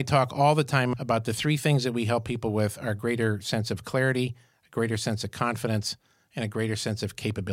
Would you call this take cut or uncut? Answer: cut